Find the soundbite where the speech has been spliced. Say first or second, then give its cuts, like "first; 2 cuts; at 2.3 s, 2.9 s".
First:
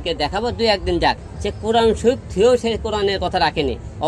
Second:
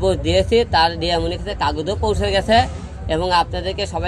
first; 1 cut; at 1.2 s